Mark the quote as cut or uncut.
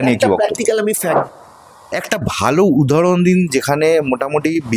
cut